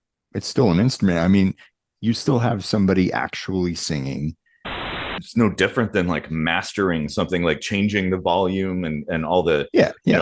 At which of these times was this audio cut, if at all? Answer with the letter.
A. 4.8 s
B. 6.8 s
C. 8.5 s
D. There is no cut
A